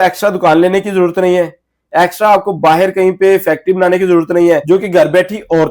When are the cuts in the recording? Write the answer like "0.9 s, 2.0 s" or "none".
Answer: 4.6 s